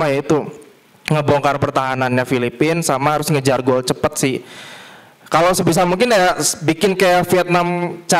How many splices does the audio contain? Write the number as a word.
zero